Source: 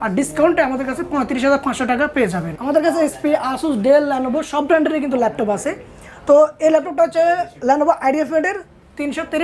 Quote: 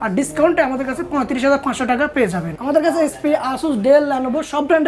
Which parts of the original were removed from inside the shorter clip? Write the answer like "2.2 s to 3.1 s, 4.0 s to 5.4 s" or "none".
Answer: none